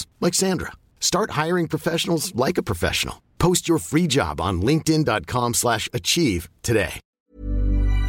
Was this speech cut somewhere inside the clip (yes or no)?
yes